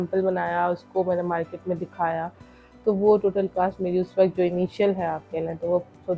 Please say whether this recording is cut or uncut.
uncut